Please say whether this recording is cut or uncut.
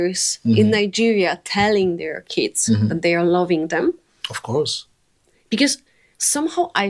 uncut